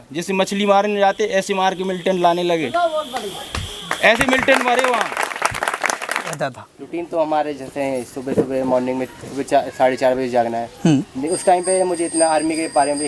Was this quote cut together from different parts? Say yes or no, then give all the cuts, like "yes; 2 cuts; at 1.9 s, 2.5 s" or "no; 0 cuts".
yes; 1 cut; at 6.3 s